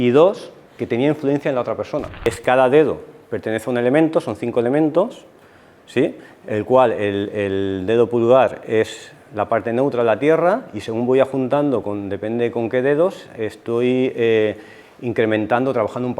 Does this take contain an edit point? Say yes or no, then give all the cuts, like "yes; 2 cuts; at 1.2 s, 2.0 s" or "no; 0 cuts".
yes; 1 cut; at 2.3 s